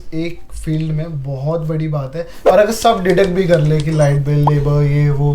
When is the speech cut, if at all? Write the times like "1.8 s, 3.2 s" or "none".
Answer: 2.3 s

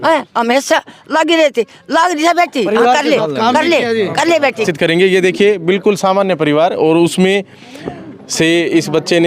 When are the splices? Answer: 4.7 s

